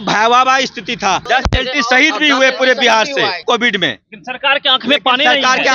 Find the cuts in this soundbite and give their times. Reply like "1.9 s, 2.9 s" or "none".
1.2 s, 3.4 s